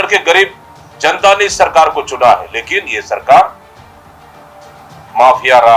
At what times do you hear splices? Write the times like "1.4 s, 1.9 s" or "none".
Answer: none